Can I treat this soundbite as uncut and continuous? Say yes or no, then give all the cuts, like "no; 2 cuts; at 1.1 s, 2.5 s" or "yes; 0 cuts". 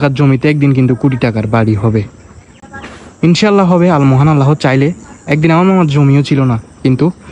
yes; 0 cuts